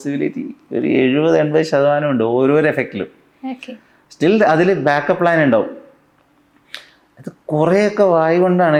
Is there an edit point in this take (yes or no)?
no